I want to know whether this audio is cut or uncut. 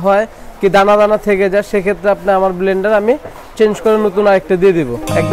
uncut